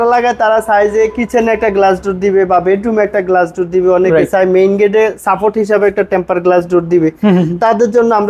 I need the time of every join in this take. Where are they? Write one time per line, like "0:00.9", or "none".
none